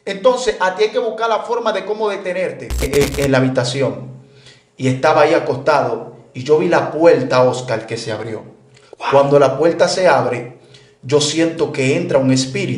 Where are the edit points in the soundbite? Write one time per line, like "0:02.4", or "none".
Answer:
0:02.9